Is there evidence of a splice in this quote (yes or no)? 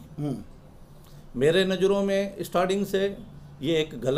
no